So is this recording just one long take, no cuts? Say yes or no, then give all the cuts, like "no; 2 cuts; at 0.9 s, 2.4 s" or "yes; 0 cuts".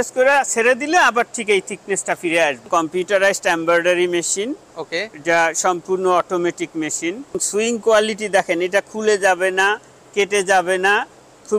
no; 2 cuts; at 2.7 s, 7.4 s